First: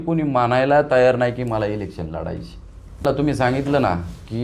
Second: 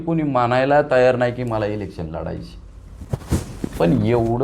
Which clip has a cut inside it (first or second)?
first